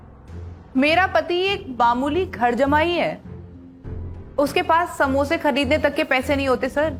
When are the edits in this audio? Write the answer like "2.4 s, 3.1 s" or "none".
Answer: none